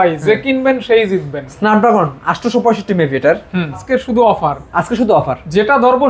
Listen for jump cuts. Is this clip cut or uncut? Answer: cut